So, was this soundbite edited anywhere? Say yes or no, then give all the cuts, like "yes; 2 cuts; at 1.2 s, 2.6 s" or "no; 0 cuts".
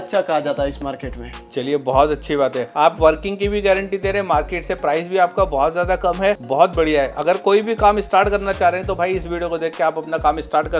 no; 0 cuts